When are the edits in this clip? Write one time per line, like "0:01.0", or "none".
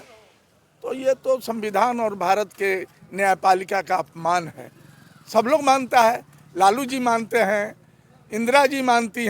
none